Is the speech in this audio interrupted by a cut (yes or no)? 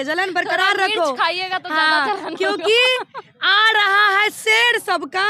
no